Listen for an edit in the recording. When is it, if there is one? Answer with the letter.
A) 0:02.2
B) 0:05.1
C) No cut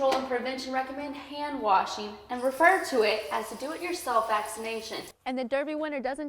B